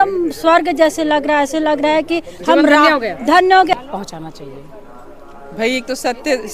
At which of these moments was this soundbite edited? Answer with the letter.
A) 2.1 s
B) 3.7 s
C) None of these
B